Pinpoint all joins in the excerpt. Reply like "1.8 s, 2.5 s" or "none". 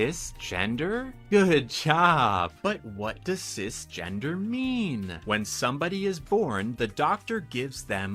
none